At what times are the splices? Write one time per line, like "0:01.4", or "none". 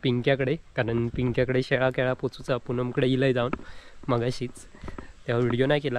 none